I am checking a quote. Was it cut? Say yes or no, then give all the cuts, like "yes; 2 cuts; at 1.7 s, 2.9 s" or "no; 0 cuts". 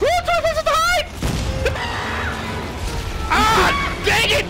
yes; 1 cut; at 1.8 s